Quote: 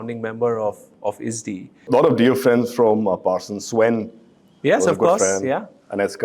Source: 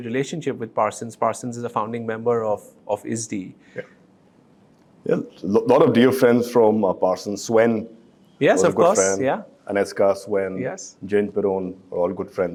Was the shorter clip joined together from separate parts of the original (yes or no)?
yes